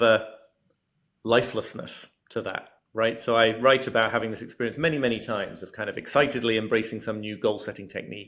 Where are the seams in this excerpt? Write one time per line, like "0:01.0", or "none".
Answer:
none